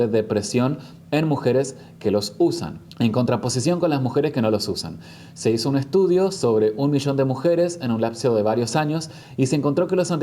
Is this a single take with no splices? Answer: yes; 0 cuts

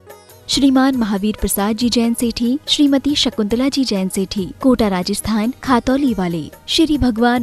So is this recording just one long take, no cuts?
yes; 0 cuts

